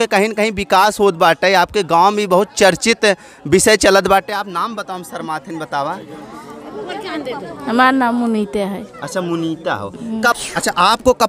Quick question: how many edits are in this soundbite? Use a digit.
1